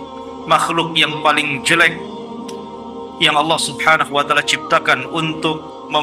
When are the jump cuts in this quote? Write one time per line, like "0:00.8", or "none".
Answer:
none